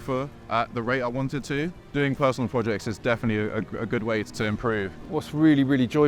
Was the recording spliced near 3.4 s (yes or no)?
no